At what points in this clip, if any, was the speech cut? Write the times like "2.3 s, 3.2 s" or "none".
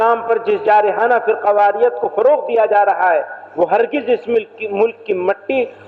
none